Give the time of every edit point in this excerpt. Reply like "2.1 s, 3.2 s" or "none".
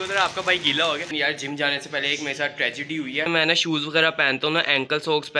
1.1 s, 3.3 s